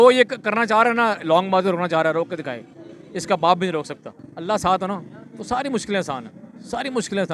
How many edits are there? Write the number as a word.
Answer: zero